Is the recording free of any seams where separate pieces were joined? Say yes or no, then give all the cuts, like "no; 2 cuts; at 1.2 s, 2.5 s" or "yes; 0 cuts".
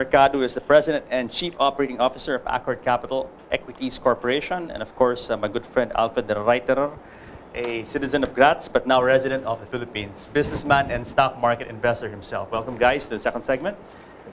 no; 1 cut; at 6.2 s